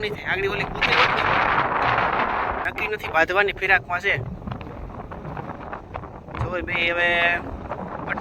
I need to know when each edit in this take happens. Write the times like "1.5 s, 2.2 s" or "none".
2.6 s